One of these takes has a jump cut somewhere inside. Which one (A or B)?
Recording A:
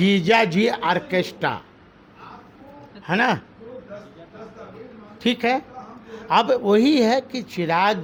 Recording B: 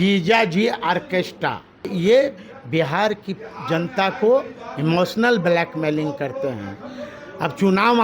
B